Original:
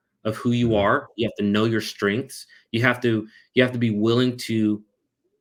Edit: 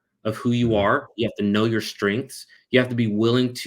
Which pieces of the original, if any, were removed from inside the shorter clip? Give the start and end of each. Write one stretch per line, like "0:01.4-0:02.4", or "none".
0:02.5-0:03.4